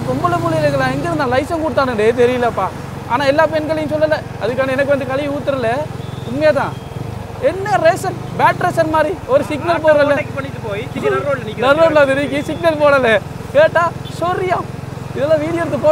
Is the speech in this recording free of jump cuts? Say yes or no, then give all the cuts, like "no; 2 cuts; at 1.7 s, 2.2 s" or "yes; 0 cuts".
yes; 0 cuts